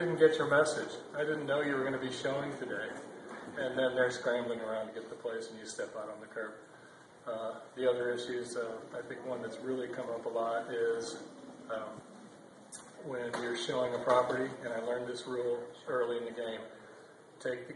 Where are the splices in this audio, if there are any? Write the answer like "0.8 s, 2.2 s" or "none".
3.2 s